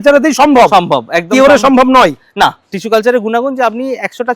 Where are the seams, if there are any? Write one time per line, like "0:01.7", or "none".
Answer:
0:02.7